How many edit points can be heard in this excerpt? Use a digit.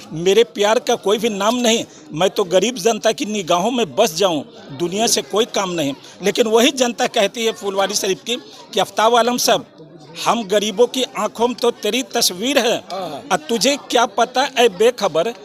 0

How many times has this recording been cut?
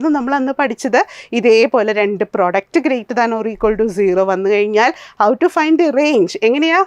0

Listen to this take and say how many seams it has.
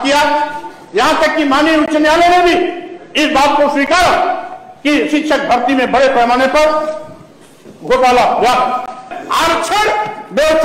1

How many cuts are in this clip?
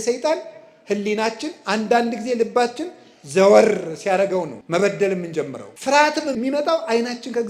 3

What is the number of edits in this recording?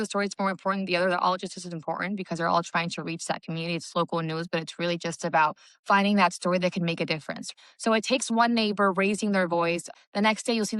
2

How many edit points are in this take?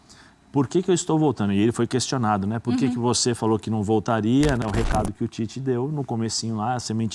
1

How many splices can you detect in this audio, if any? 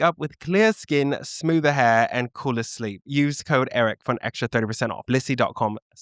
1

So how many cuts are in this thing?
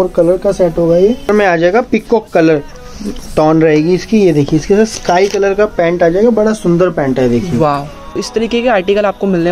2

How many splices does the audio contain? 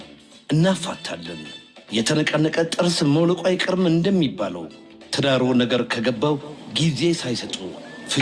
0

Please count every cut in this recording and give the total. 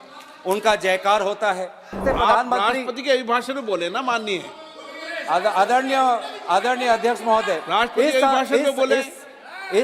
1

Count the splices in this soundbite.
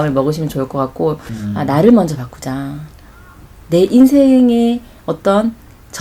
1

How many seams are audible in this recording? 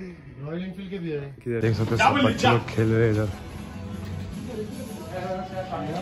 1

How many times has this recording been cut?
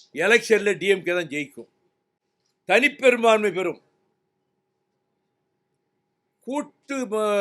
0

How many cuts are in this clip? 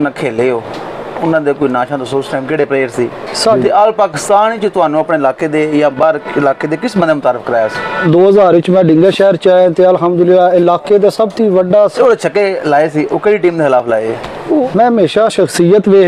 4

